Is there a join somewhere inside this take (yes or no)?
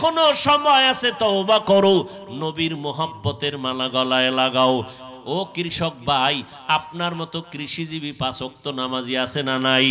yes